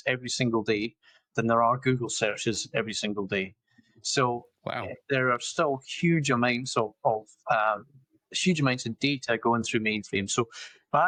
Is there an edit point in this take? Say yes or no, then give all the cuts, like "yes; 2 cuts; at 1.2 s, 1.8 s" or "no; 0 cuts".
no; 0 cuts